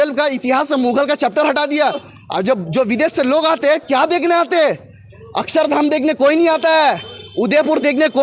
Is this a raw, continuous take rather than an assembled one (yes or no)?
no